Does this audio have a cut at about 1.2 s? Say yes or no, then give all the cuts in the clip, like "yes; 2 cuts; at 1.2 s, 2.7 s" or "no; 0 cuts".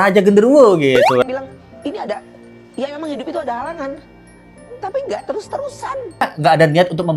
yes; 2 cuts; at 1.2 s, 6.2 s